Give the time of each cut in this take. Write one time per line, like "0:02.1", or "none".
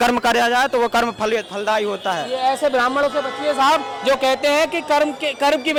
none